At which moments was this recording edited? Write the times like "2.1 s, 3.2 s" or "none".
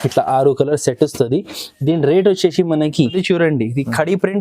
3.2 s